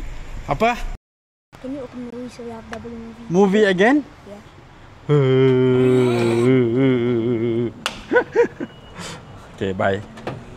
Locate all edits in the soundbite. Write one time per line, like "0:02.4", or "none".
none